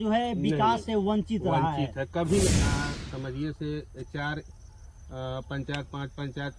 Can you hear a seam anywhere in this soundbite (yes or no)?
yes